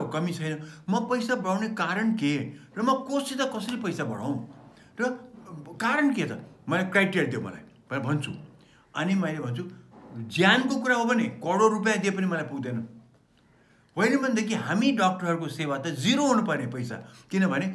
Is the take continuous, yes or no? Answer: yes